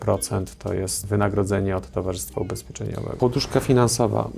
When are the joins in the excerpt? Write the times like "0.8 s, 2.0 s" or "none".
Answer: 1.0 s, 3.1 s

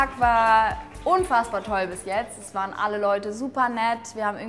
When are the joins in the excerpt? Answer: 1.0 s

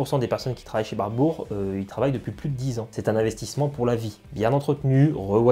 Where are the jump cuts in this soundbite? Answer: 2.8 s

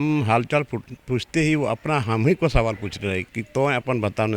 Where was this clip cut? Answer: 3.3 s

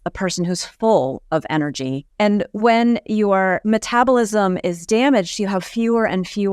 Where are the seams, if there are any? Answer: 2.0 s, 3.6 s

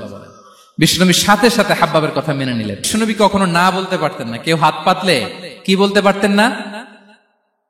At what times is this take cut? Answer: 2.9 s

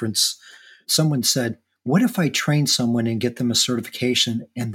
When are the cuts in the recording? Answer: 1.7 s

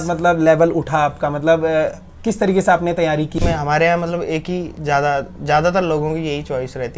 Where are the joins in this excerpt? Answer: 3.4 s

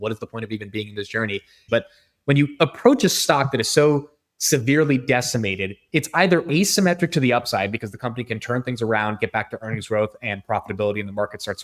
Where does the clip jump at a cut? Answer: 1.6 s

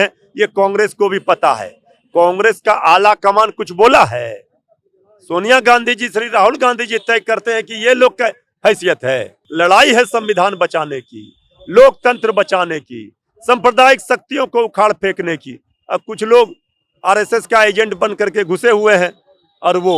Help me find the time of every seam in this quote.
9.4 s

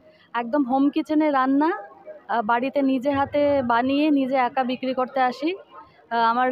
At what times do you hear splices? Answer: none

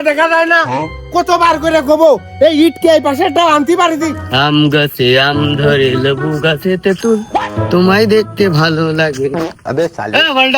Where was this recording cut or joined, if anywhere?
4.2 s

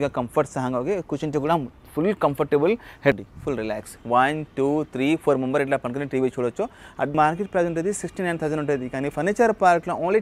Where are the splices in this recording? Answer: 3.2 s, 7.1 s

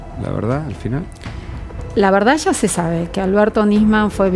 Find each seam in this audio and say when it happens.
none

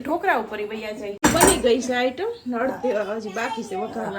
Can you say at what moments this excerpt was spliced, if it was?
1.2 s

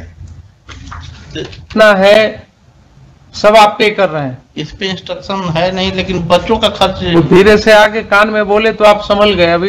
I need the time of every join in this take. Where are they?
1.7 s

